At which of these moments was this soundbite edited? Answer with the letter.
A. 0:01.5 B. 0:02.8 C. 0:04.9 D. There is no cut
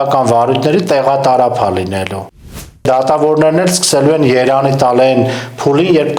B